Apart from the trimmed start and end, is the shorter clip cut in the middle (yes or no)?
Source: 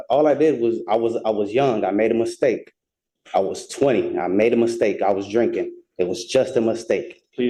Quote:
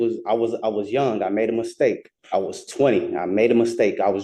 yes